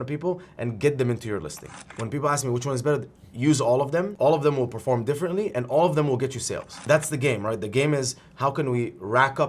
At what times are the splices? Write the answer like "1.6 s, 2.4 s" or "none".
1.7 s, 4.1 s